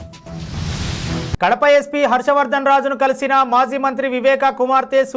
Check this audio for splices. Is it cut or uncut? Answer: cut